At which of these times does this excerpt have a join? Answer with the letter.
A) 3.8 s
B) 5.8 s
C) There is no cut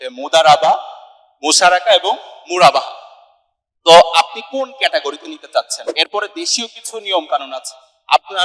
B